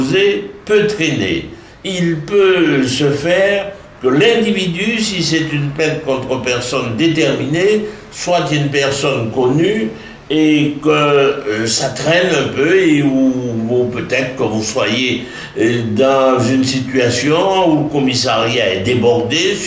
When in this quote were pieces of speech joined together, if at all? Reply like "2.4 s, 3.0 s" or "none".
none